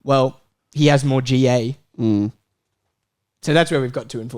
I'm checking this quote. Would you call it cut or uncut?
uncut